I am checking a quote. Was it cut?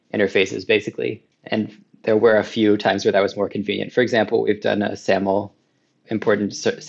no; 0 cuts

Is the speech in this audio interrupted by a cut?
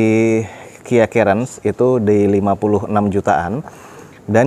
no; 0 cuts

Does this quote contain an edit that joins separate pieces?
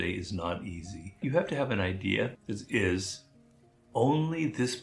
yes; 2 cuts; at 1.1 s, 2.4 s

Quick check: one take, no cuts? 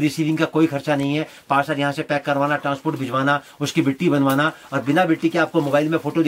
yes; 0 cuts

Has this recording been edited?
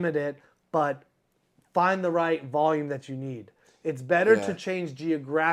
no; 0 cuts

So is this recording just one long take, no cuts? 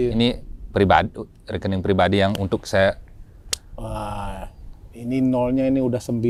yes; 0 cuts

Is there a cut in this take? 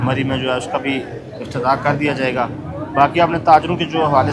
no; 0 cuts

